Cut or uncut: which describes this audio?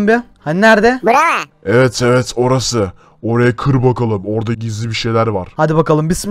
uncut